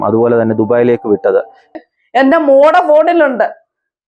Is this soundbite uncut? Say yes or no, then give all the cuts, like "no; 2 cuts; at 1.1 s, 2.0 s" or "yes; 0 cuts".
no; 1 cut; at 1.8 s